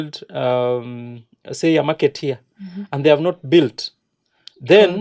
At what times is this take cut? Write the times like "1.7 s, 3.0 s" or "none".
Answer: none